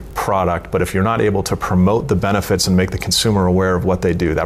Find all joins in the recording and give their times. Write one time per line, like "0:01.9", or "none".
none